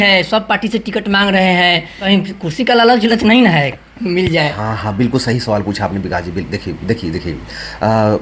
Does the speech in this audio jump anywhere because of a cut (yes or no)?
yes